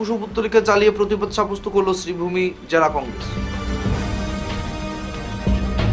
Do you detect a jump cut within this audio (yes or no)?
no